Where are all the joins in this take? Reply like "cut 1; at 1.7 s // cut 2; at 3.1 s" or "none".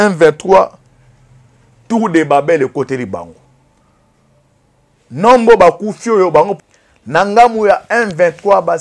cut 1; at 6.5 s